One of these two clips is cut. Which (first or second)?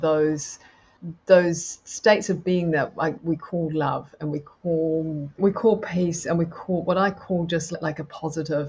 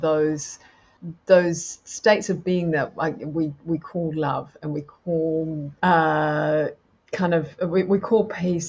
first